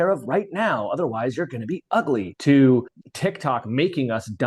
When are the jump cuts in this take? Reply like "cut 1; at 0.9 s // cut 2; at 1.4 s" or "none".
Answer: cut 1; at 2.3 s // cut 2; at 3.0 s